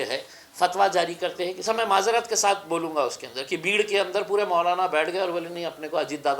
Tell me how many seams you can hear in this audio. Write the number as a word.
one